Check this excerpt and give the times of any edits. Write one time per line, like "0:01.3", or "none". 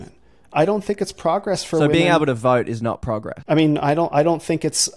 none